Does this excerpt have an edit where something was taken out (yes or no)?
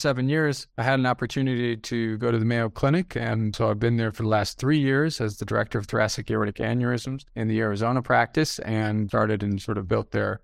no